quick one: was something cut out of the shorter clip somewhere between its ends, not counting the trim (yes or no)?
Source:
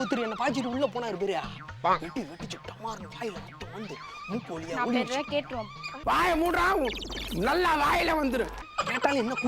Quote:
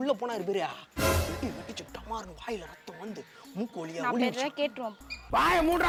no